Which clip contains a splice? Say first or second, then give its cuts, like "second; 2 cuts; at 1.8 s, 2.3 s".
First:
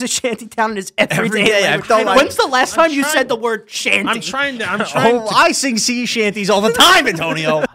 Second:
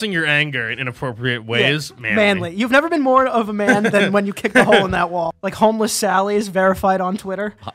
second; 1 cut; at 5.3 s